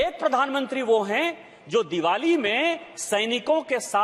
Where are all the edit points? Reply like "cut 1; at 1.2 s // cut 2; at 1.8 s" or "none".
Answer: none